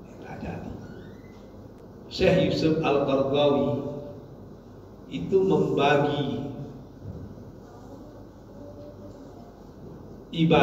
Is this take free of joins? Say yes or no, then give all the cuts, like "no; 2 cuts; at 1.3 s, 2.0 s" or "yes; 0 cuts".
no; 1 cut; at 1.8 s